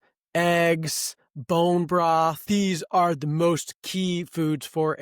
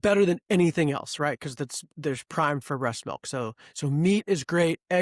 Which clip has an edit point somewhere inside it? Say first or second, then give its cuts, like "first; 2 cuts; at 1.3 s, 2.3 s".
first; 1 cut; at 2.4 s